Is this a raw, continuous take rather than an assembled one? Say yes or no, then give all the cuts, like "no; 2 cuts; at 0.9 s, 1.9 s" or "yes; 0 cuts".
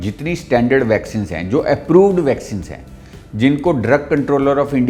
yes; 0 cuts